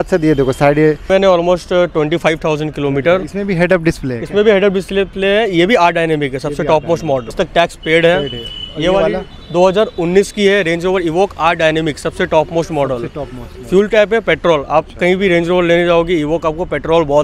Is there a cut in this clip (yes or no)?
yes